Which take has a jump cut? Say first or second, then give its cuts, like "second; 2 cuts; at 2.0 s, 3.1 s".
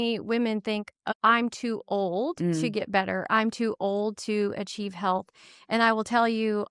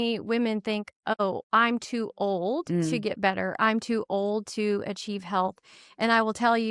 first; 1 cut; at 1.1 s